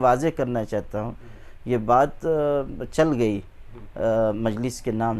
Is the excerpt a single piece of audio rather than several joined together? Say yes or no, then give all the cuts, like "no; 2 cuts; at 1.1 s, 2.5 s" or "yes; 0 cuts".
yes; 0 cuts